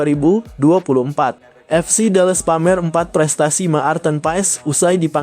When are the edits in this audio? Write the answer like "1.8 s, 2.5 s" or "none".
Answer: 1.5 s